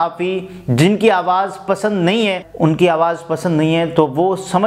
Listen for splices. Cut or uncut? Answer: cut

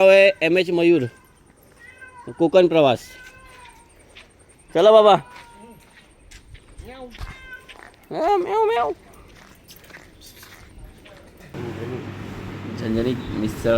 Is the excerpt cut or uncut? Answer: cut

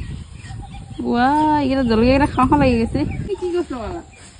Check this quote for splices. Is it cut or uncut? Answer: cut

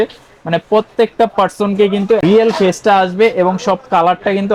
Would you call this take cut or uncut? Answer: uncut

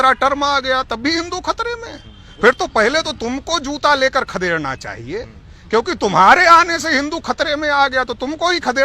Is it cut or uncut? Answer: uncut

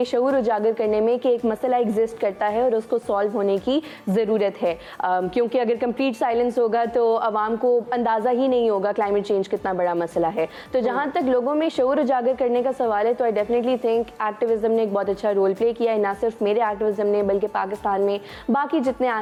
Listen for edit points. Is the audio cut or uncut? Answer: uncut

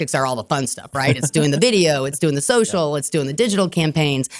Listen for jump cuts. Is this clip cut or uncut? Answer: uncut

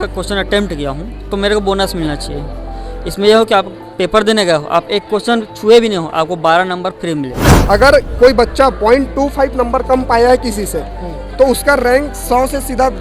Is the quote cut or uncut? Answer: cut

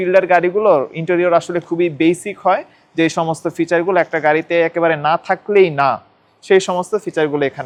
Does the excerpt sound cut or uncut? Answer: uncut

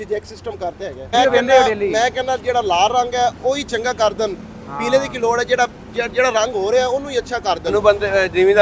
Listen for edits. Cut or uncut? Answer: cut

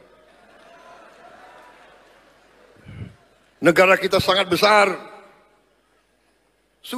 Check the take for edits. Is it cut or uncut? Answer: uncut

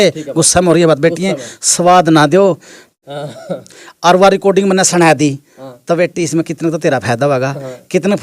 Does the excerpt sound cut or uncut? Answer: cut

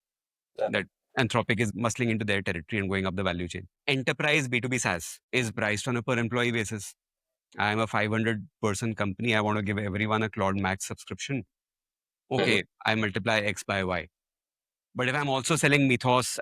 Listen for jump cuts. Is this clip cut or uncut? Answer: cut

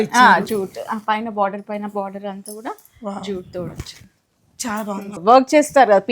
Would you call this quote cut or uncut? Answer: cut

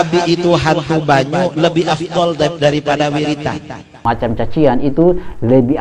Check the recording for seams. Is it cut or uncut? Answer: cut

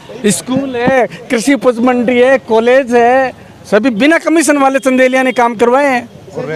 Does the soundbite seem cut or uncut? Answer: uncut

